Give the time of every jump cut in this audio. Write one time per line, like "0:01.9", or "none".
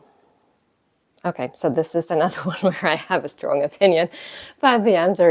none